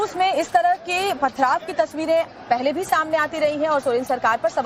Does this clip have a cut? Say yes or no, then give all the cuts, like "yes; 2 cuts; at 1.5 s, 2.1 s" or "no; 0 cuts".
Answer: yes; 1 cut; at 3.0 s